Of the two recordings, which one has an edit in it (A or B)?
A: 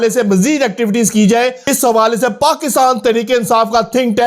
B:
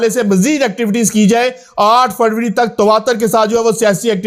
A